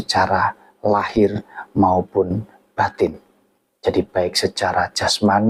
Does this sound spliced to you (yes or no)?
no